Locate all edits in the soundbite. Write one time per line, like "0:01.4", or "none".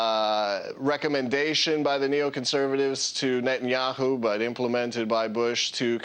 none